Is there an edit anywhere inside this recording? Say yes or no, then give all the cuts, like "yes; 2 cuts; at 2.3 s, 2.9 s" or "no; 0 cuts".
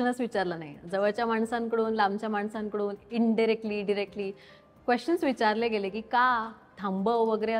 no; 0 cuts